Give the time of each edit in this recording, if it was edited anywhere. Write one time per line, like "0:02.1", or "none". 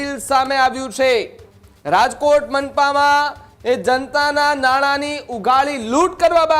none